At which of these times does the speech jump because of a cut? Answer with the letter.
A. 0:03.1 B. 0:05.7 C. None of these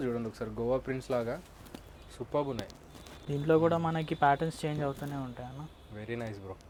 C